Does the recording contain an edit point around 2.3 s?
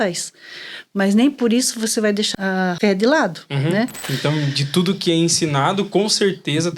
yes; 2 cuts; at 2.3 s, 4.0 s

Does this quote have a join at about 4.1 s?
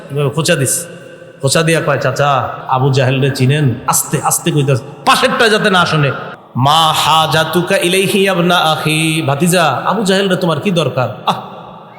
no; 2 cuts; at 2.6 s, 6.3 s

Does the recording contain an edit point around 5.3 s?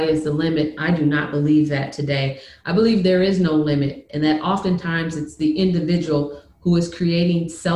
yes; 1 cut; at 5.3 s

